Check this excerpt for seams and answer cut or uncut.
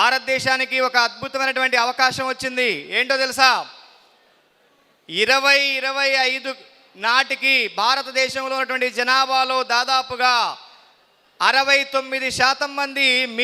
uncut